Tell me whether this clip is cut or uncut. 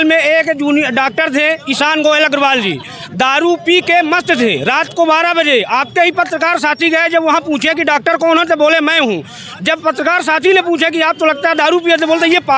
uncut